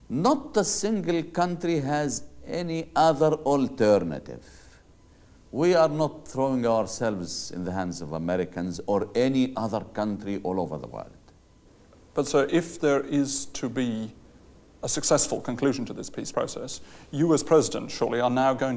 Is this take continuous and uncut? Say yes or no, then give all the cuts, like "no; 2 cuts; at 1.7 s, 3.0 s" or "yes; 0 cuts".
yes; 0 cuts